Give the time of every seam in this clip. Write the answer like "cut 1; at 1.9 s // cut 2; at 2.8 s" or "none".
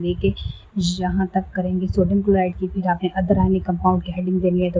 none